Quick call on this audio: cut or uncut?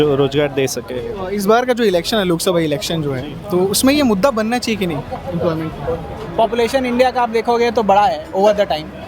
cut